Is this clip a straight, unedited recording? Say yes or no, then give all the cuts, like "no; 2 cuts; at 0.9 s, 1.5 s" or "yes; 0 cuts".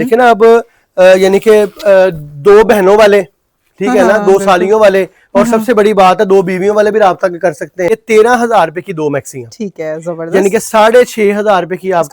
no; 1 cut; at 7.9 s